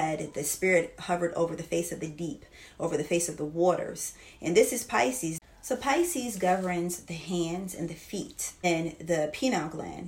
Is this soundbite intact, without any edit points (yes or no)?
no